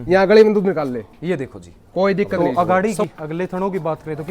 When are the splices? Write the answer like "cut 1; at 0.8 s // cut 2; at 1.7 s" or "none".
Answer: cut 1; at 2.4 s